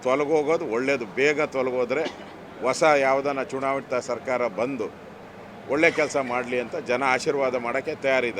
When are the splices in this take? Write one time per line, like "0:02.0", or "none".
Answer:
none